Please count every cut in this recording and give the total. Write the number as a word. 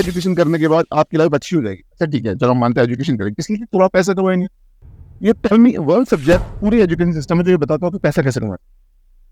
zero